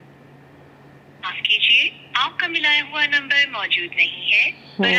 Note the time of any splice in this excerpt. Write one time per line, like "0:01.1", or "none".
none